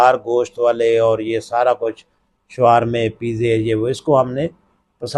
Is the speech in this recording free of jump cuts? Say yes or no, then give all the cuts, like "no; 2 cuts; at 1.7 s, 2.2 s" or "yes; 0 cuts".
yes; 0 cuts